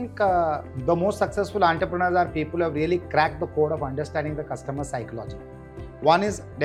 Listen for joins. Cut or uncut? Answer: uncut